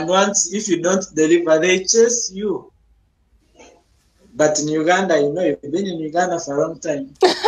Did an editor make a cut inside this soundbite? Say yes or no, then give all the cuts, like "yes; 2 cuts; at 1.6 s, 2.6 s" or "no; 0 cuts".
no; 0 cuts